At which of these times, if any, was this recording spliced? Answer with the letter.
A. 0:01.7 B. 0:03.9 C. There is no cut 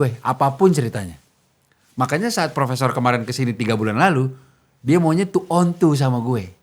C